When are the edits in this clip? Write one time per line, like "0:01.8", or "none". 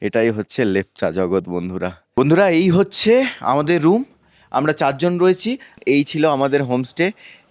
0:02.0
0:05.7